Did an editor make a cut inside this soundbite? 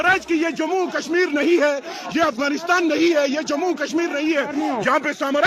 no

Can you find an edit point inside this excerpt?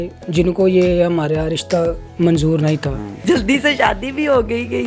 yes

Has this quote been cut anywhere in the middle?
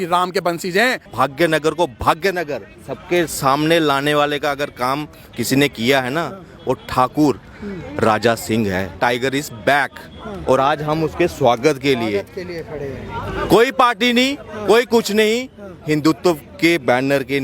yes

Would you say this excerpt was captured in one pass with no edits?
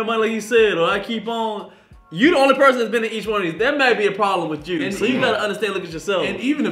yes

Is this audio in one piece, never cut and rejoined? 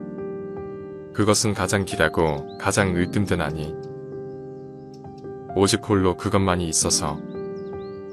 no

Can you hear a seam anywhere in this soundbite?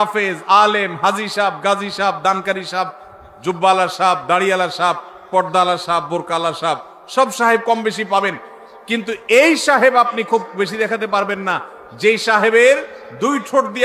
no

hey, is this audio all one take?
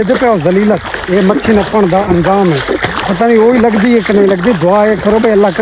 yes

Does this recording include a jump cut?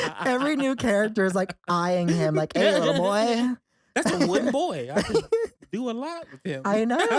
no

